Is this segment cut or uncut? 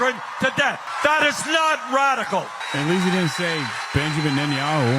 cut